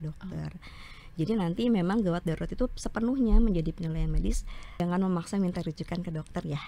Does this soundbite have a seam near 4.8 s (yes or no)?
yes